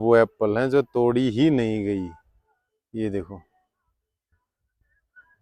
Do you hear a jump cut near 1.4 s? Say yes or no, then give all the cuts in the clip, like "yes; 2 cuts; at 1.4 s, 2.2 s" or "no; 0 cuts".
no; 0 cuts